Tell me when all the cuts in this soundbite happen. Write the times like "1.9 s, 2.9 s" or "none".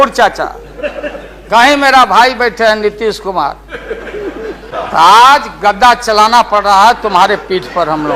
4.7 s